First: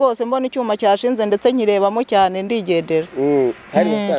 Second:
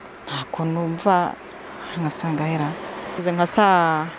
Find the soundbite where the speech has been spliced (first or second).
second